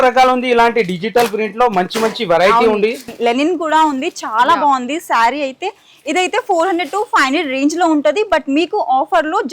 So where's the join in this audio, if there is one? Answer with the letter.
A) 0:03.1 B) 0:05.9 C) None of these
A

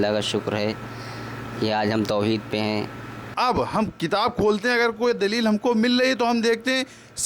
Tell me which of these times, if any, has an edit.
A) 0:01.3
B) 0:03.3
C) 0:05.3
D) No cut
B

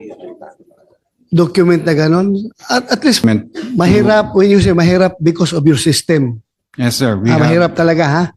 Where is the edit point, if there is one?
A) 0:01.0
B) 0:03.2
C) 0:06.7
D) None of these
B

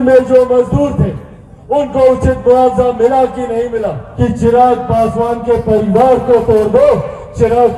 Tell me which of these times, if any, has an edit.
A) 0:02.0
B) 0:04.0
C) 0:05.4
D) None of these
B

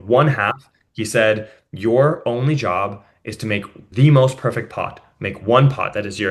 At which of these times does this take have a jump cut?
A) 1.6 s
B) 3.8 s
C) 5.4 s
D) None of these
B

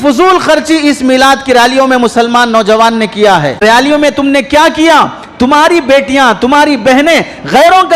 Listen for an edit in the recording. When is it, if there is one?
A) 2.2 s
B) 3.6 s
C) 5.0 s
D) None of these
B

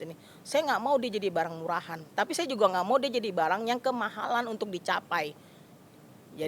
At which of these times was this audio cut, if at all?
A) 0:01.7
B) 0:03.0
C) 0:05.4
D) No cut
D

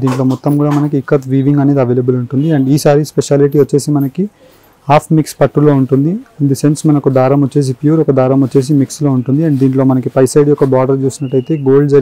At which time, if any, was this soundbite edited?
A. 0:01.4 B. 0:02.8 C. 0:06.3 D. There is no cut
D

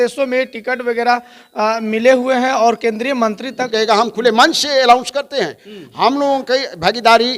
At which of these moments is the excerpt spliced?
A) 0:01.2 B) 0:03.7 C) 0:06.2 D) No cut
B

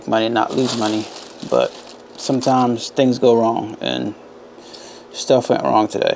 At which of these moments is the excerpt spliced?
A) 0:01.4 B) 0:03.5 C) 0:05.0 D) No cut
D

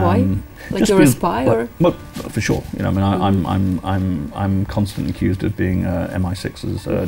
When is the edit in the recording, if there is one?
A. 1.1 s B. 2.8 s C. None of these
C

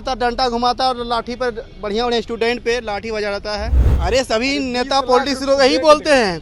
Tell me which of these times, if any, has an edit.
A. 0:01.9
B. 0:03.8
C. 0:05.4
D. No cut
B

